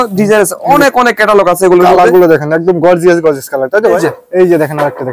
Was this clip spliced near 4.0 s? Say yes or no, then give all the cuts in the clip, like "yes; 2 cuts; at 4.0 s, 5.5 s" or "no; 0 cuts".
yes; 1 cut; at 4.0 s